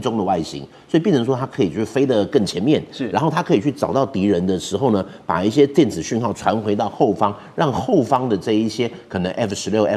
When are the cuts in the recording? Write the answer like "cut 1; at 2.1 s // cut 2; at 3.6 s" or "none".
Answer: none